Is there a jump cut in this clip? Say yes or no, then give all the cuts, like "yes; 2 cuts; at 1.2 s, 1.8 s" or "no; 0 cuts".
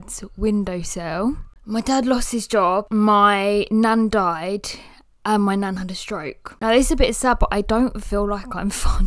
yes; 3 cuts; at 1.5 s, 2.9 s, 6.5 s